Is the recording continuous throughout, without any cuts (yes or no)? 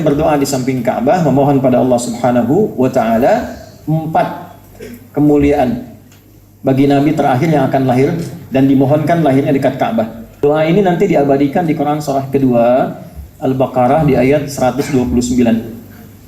no